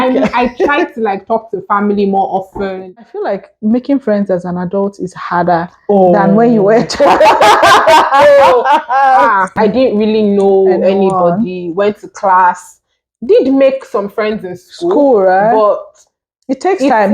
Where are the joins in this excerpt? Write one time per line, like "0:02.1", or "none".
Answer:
0:03.0
0:09.5

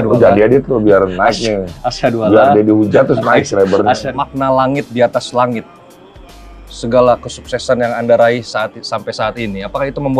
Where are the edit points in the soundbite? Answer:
0:04.0

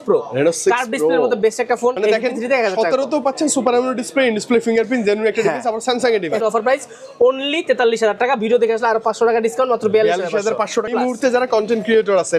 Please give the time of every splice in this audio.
0:02.0
0:06.4
0:10.9

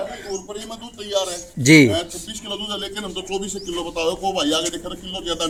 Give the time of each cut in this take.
none

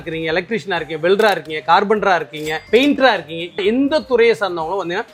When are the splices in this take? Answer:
none

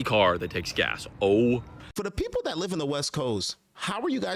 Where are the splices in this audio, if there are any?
0:01.8

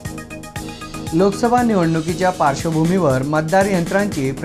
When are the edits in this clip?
0:01.1

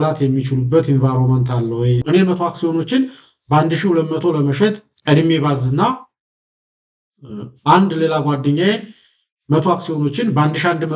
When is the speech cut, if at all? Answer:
0:02.0

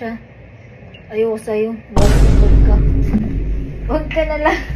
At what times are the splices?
none

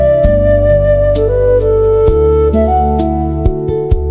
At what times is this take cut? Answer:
none

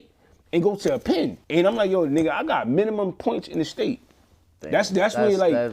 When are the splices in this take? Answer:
0:01.4

